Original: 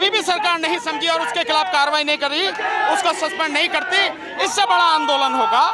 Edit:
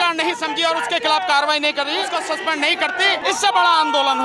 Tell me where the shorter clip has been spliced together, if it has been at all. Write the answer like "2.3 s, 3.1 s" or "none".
2.1 s, 3.2 s